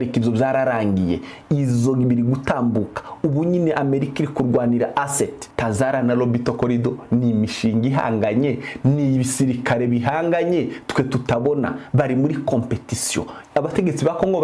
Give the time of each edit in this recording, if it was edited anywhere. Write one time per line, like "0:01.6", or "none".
0:05.4
0:13.4